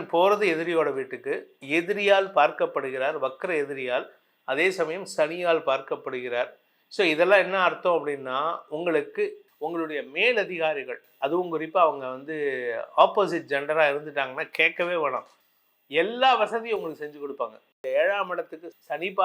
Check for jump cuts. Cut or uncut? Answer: cut